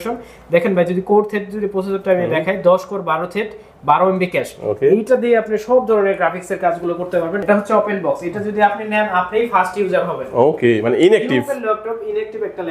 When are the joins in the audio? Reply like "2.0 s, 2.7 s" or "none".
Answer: 7.4 s